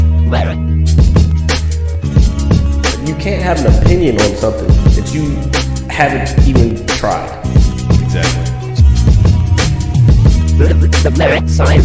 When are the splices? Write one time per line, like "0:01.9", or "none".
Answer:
none